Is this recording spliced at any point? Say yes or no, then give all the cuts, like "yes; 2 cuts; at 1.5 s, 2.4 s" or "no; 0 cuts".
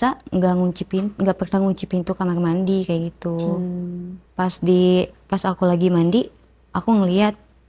no; 0 cuts